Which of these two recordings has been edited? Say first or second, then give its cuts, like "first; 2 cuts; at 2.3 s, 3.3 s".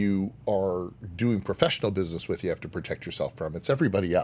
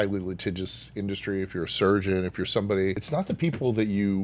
second; 1 cut; at 3.0 s